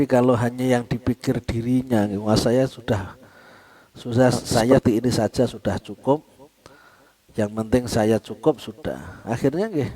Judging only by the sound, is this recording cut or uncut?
cut